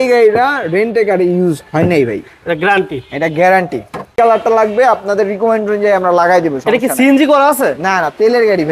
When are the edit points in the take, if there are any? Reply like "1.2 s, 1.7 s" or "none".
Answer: 4.1 s